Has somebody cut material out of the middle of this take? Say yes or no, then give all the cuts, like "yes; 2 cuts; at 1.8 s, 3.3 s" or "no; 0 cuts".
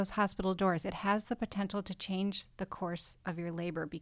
no; 0 cuts